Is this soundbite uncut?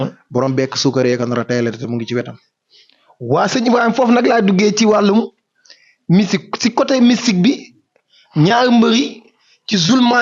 yes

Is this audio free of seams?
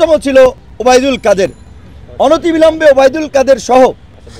yes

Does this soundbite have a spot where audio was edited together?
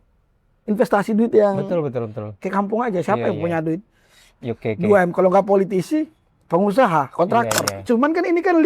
yes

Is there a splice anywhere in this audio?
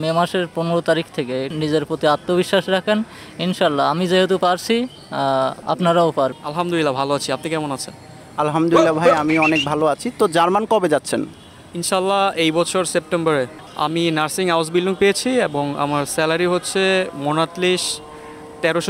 yes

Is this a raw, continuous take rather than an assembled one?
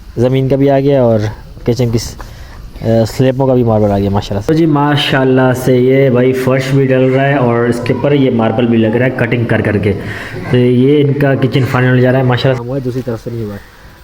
no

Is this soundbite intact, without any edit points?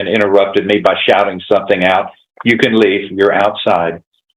yes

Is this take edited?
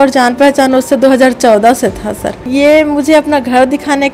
yes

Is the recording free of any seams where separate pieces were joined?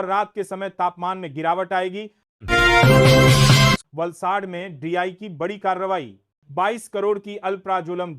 no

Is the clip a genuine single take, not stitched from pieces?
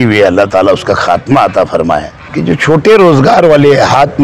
no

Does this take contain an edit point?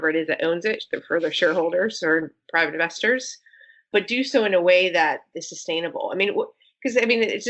no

